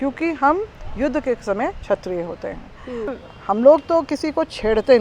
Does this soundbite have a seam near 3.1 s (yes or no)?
yes